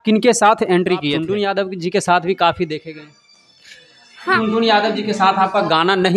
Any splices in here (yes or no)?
yes